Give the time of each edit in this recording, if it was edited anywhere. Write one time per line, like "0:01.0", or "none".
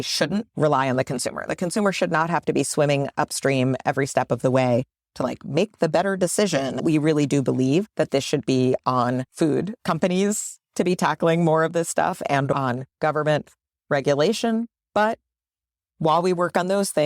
0:06.8
0:12.5